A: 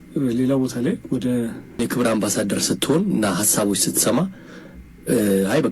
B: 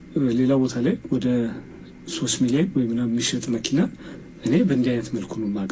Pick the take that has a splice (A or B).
A